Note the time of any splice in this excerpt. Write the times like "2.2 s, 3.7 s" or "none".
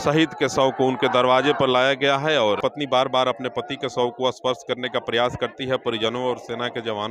2.6 s